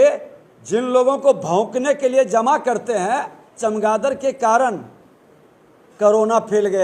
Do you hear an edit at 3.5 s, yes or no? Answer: yes